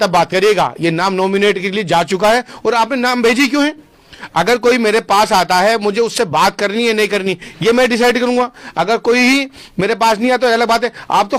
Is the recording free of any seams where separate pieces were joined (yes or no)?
yes